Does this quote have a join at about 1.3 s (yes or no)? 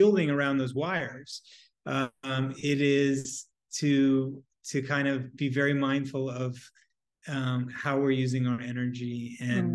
no